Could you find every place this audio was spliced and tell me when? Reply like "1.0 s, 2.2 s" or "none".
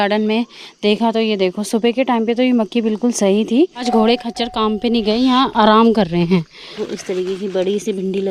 3.8 s, 6.8 s